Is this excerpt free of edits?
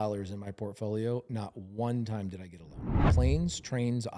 no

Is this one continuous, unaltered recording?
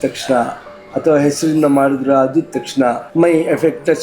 no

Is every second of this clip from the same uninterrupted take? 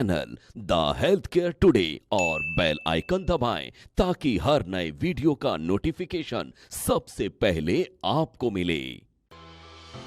no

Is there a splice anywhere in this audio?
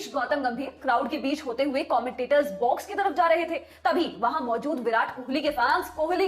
no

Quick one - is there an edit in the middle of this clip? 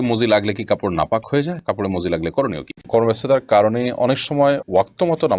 yes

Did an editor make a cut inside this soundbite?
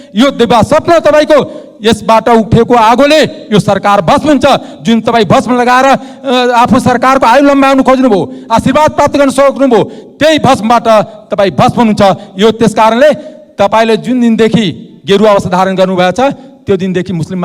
no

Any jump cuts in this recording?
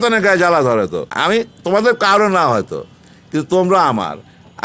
yes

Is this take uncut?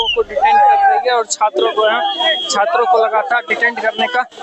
yes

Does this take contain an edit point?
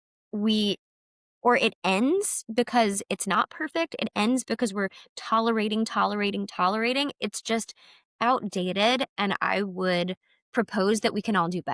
no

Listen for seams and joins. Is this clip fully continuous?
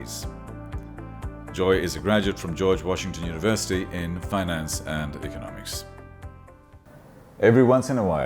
no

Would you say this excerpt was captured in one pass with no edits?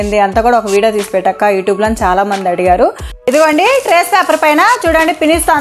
no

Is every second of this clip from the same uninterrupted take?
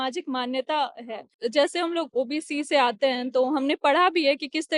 no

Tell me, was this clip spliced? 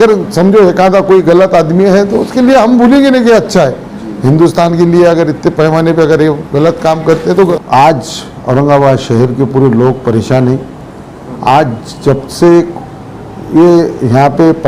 yes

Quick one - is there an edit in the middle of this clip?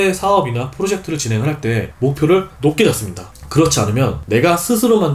no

